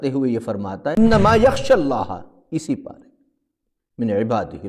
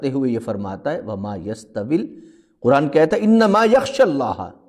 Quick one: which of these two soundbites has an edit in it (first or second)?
first